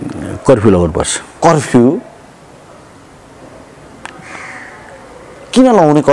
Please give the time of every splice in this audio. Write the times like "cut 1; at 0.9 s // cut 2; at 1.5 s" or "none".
none

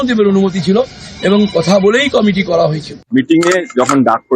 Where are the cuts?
cut 1; at 3.0 s

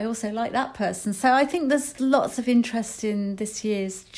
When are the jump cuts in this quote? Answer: cut 1; at 2.0 s

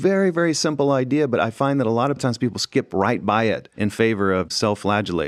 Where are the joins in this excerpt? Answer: none

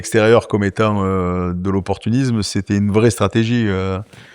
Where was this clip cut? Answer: none

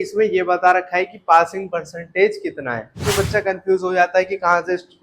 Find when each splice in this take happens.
cut 1; at 3.1 s

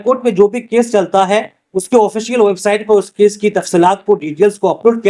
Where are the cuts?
none

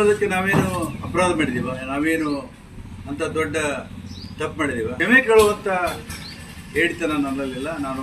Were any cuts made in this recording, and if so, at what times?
cut 1; at 5.0 s

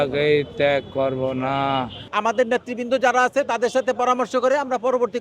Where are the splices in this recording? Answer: cut 1; at 2.0 s

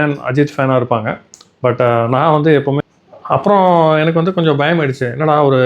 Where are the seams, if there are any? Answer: cut 1; at 2.8 s

